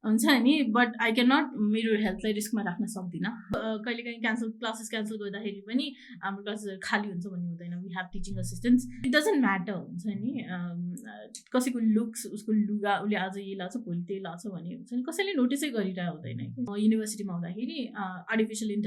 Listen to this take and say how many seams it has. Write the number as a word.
three